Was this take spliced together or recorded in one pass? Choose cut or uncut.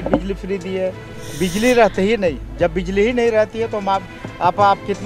cut